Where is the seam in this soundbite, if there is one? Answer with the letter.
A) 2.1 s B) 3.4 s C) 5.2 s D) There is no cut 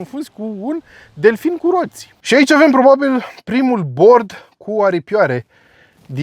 A